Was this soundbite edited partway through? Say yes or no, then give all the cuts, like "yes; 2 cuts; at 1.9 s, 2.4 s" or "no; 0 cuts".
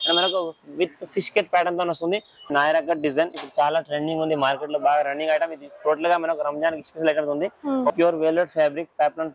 yes; 2 cuts; at 2.4 s, 7.9 s